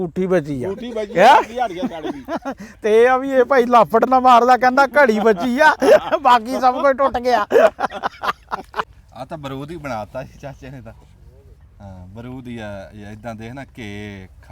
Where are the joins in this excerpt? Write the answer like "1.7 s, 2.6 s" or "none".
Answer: 8.9 s